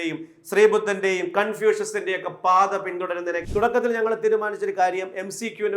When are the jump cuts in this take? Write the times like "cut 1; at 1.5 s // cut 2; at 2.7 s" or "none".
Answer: cut 1; at 3.4 s